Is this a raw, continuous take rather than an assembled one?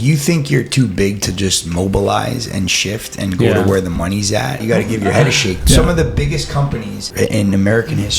no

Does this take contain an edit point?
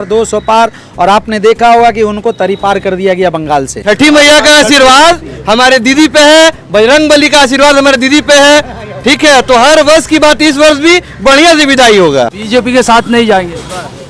yes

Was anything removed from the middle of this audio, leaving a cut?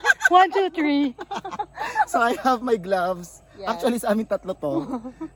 no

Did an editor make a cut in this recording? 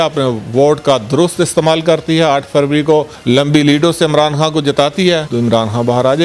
yes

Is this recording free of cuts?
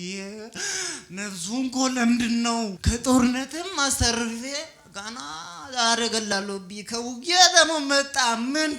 no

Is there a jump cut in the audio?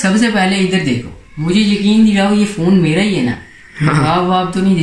no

